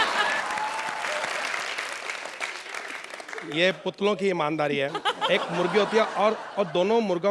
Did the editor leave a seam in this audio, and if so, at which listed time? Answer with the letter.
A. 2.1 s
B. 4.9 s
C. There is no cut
C